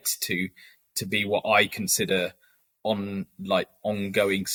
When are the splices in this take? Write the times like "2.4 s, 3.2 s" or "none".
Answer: none